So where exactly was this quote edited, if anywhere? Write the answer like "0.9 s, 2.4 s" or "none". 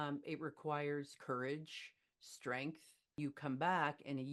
3.2 s